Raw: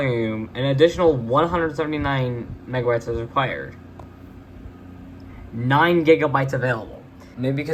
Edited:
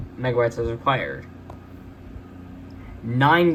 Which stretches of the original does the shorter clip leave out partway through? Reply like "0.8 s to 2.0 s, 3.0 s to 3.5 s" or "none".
none